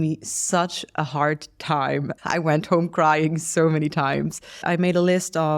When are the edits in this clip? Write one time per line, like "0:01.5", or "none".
0:02.1
0:04.6